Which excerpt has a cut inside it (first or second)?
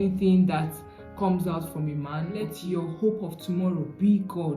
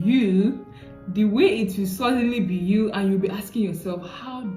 first